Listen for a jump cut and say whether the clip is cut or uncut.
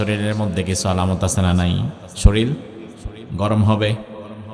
cut